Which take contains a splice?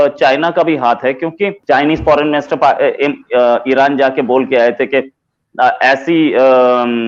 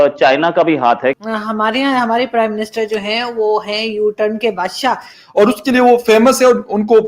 second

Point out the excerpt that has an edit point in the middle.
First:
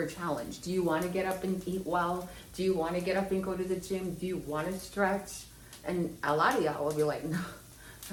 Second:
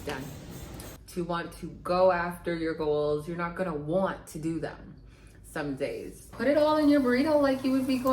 second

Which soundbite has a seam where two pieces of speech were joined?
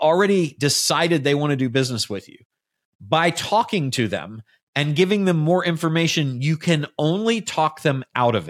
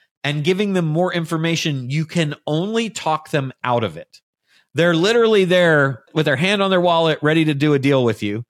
second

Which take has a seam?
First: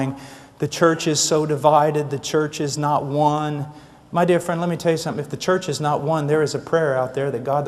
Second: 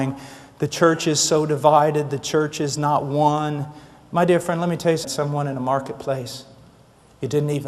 first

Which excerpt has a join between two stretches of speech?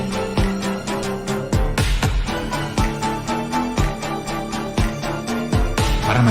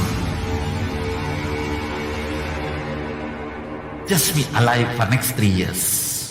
first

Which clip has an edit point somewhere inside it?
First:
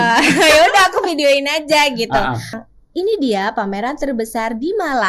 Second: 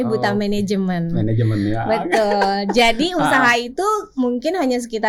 first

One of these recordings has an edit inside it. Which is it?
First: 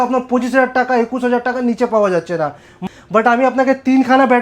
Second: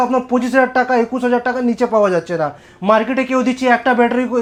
first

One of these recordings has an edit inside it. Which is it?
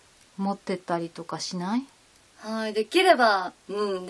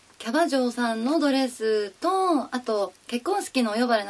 second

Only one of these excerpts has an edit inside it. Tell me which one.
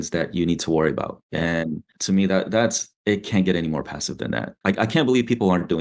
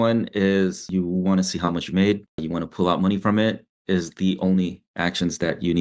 first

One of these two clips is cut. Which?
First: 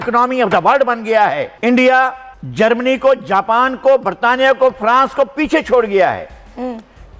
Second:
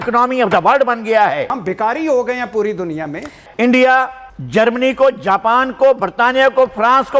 second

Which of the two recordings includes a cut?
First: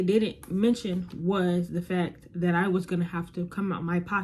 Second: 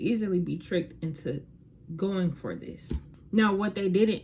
second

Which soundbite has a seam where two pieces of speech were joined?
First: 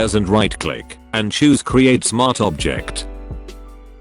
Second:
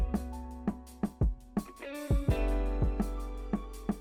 first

